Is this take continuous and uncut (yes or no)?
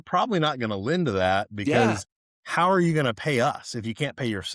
yes